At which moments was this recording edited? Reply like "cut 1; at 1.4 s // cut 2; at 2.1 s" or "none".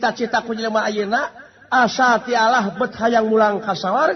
none